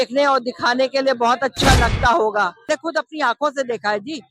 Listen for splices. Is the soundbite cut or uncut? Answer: cut